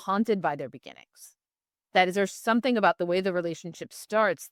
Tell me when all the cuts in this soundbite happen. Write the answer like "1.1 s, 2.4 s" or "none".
none